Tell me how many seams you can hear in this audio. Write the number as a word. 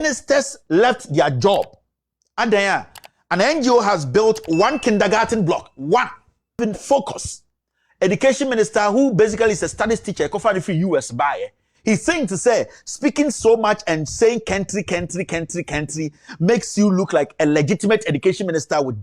one